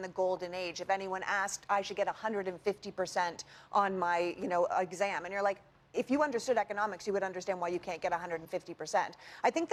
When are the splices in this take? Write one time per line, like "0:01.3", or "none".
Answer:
none